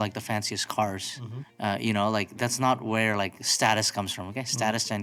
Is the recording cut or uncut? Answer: uncut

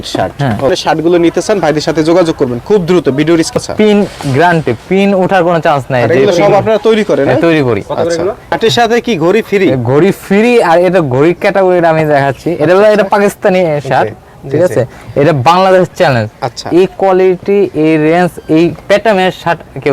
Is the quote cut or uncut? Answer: cut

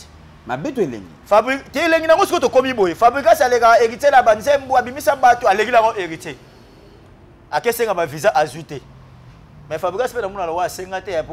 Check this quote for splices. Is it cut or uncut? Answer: uncut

